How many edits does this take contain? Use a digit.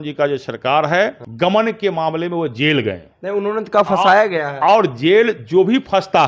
1